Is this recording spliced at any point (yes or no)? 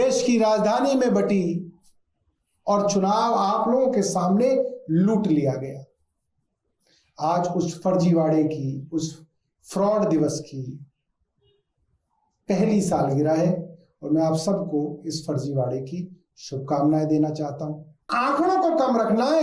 yes